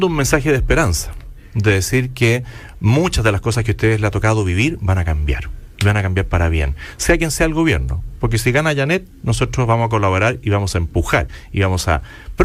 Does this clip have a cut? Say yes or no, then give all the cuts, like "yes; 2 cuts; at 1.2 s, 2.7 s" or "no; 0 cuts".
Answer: no; 0 cuts